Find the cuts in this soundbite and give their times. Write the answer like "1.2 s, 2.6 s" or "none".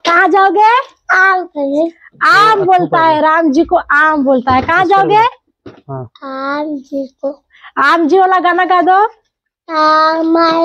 none